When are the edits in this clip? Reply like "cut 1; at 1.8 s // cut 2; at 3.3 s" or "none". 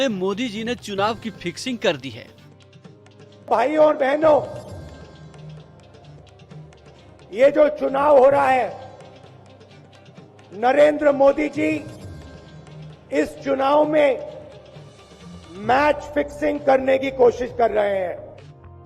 cut 1; at 9.1 s // cut 2; at 10.5 s